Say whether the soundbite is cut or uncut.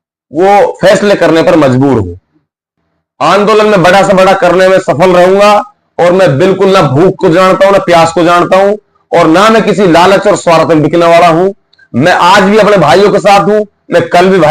cut